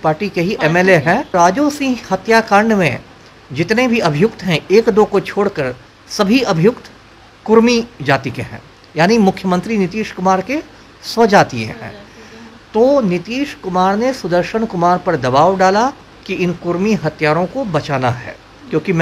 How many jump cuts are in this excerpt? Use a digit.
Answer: 1